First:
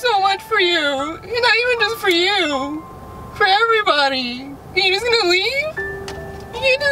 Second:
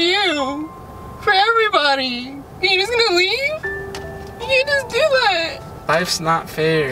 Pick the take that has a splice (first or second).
second